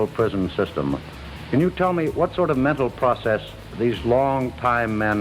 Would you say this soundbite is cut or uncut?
uncut